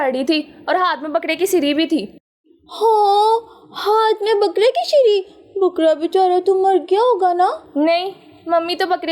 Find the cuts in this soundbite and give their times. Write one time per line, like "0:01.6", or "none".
none